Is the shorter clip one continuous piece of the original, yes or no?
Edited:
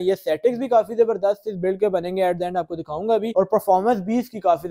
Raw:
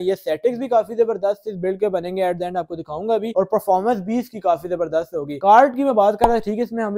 yes